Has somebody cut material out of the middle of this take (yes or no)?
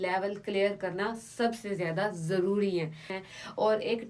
yes